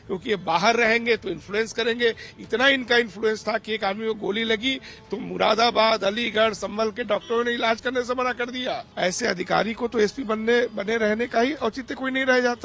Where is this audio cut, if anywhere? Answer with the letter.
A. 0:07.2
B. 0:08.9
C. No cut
B